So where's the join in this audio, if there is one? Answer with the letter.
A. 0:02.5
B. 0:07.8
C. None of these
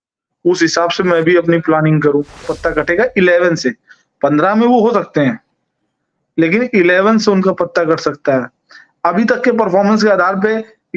A